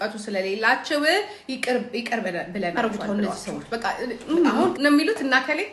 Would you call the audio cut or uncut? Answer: cut